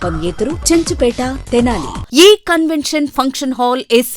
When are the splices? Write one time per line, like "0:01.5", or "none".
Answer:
0:01.9